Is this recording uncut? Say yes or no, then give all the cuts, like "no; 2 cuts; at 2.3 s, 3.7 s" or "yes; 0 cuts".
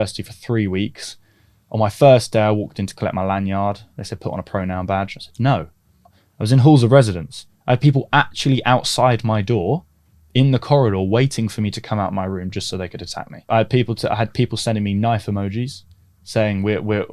no; 2 cuts; at 6.1 s, 13.5 s